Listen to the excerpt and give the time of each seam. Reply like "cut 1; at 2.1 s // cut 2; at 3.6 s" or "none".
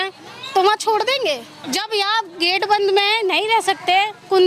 cut 1; at 1.6 s